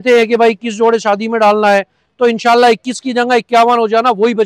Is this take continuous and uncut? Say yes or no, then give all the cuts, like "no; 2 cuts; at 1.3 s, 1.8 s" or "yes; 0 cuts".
yes; 0 cuts